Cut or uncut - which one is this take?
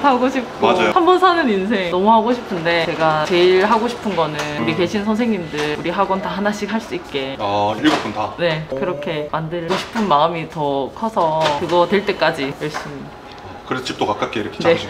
uncut